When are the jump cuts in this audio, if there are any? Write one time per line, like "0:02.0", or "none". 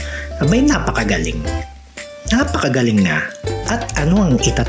0:03.6